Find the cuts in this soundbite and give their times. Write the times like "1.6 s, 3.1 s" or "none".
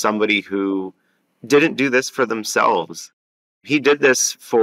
3.6 s